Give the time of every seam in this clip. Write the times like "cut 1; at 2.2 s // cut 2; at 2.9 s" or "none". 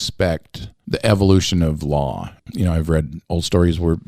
cut 1; at 2.4 s // cut 2; at 3.2 s